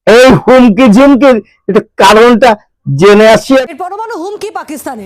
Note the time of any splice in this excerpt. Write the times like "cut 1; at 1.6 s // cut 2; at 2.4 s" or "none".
cut 1; at 3.7 s